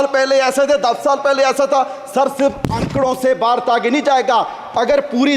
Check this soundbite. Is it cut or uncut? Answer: uncut